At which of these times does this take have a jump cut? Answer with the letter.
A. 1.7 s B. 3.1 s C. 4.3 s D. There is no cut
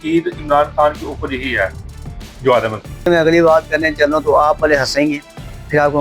B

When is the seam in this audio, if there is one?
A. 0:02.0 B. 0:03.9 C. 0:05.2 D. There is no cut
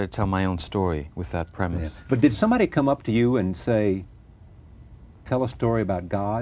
B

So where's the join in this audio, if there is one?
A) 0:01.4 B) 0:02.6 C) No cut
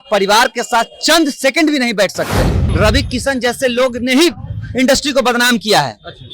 B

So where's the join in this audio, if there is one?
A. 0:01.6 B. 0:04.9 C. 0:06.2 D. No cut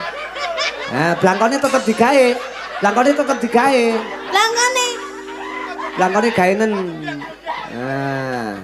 D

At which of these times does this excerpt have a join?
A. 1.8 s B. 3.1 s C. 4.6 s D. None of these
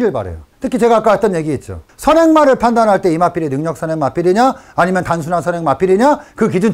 A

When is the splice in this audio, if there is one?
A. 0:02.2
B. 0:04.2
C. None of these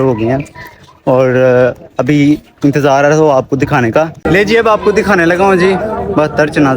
B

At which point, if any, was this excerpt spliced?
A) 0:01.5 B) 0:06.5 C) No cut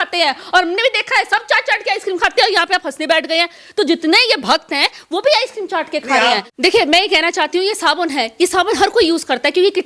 B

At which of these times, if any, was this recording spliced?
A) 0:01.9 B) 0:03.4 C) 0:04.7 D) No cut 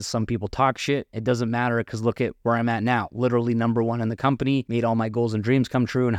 C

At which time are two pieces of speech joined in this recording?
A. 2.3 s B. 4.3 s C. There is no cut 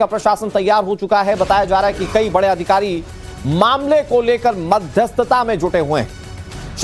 A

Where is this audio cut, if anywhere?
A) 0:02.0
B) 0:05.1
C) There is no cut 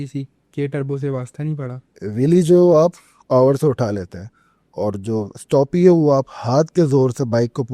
A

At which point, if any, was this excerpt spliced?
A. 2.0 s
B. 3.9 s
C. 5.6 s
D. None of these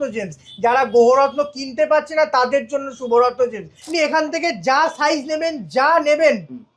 B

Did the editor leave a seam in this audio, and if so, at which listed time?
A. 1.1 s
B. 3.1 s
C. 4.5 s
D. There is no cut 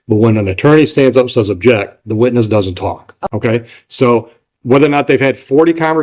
B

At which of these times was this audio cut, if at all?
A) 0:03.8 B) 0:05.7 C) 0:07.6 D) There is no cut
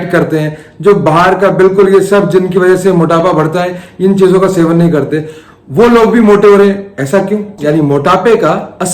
C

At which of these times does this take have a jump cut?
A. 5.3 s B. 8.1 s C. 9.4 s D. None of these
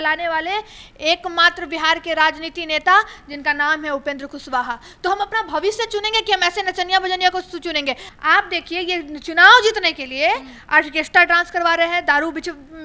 D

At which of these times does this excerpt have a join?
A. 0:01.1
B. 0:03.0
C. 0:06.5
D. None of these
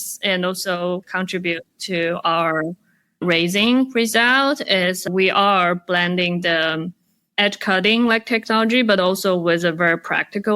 A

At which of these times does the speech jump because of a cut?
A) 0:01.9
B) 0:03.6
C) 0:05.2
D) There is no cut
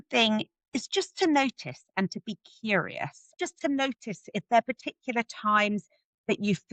D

